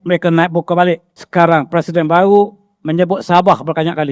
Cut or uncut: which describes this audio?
cut